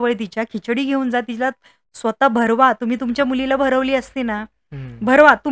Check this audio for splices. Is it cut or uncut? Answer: uncut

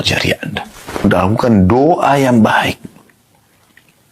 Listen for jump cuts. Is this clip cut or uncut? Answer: cut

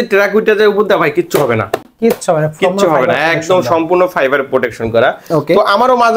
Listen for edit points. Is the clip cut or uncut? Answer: uncut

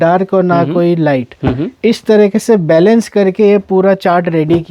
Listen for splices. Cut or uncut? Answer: uncut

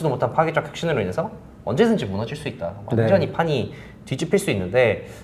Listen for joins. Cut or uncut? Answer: uncut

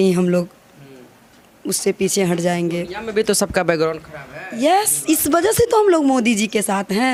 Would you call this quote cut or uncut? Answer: uncut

